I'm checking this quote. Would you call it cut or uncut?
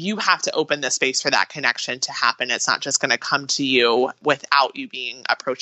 cut